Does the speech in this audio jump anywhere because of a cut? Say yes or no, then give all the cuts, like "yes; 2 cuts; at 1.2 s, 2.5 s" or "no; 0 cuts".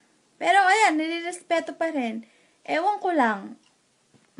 yes; 1 cut; at 2.7 s